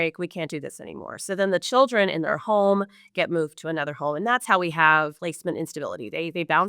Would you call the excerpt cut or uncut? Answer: cut